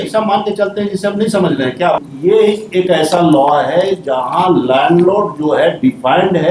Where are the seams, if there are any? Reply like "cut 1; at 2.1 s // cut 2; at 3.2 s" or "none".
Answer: cut 1; at 2.0 s